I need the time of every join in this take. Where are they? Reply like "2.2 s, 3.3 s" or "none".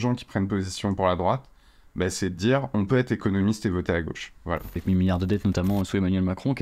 4.8 s